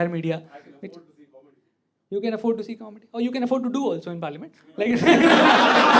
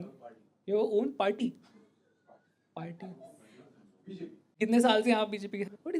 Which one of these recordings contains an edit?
second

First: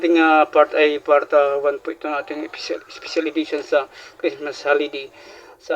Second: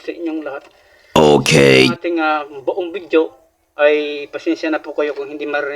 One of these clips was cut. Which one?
second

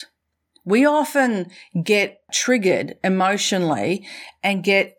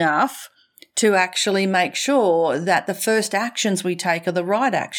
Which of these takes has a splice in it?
first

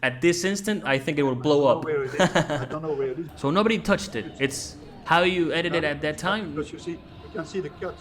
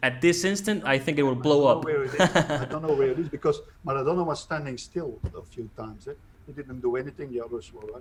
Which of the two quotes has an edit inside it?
first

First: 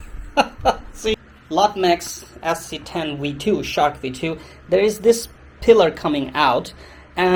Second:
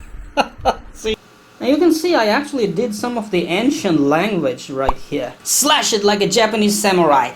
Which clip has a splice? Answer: second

